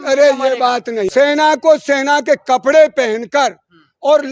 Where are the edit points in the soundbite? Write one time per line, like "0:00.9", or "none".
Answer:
0:01.1